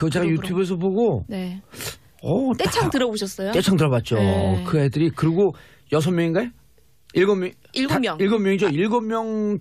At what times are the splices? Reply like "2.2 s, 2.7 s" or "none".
2.3 s